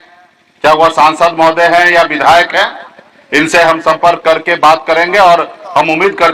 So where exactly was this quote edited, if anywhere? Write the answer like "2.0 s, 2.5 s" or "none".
none